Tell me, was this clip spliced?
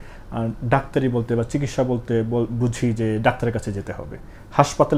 no; 0 cuts

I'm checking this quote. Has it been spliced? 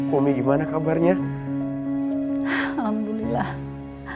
no; 0 cuts

